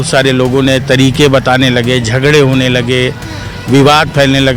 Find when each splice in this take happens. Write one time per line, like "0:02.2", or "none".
none